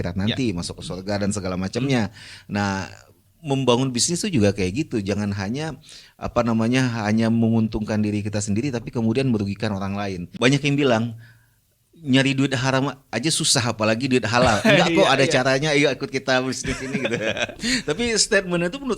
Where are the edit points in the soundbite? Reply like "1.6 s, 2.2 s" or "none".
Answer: 10.2 s